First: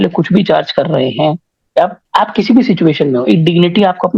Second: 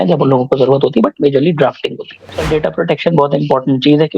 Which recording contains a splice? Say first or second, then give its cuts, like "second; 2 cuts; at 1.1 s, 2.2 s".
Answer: second; 1 cut; at 2.4 s